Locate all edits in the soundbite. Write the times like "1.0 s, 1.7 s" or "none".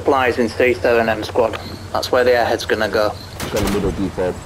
3.3 s

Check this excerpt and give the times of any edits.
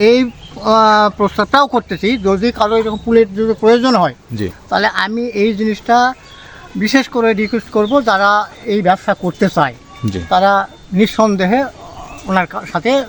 none

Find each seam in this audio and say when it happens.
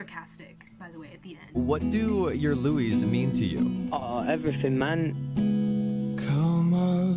1.5 s

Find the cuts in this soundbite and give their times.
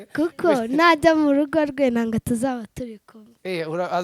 none

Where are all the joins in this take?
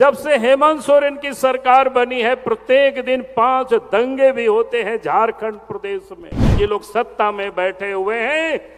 6.5 s

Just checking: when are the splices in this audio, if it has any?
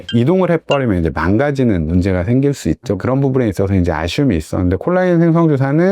2.9 s

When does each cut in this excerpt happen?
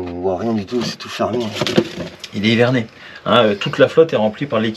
2.2 s

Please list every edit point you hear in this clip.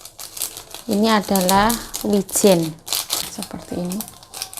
3.3 s

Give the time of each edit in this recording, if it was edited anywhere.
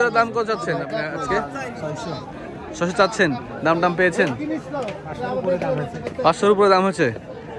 none

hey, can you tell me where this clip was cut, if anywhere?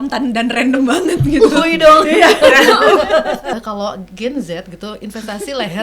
3.5 s

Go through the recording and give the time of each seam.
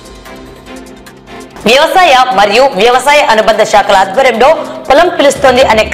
1.4 s

